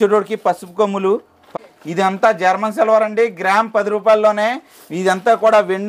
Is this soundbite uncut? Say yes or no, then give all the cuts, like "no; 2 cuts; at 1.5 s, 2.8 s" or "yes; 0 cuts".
no; 1 cut; at 1.5 s